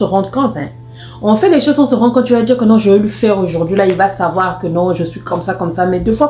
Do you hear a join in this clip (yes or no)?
no